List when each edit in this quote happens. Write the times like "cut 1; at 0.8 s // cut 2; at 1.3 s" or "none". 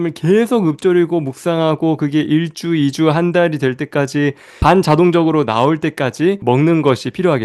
cut 1; at 6.4 s